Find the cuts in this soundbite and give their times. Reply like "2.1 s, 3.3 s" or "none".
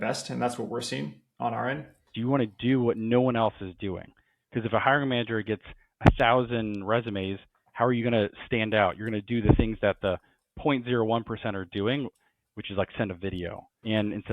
2.1 s